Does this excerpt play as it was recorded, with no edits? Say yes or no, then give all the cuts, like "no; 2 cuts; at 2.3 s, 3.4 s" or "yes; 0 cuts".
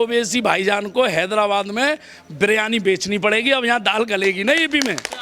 yes; 0 cuts